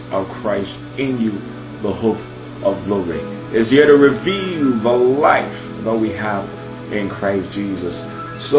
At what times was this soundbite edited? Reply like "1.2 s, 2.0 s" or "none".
3.6 s